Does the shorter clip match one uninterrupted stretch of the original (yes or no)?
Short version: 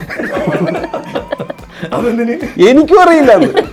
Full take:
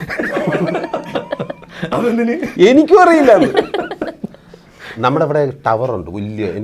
yes